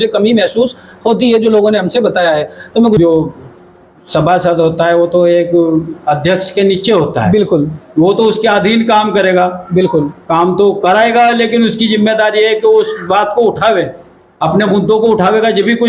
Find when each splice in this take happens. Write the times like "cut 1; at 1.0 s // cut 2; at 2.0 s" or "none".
cut 1; at 3.0 s